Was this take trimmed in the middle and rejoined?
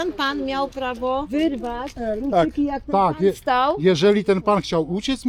yes; 1 cut; at 1.3 s

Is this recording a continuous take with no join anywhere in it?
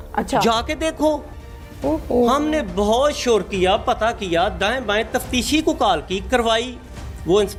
yes; 0 cuts

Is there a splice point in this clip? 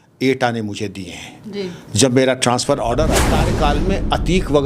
yes; 1 cut; at 3.4 s

